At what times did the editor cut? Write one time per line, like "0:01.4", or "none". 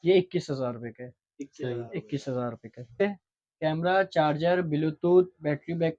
0:03.0